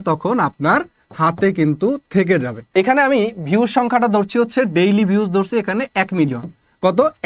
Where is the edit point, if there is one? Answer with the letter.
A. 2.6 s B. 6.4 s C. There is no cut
A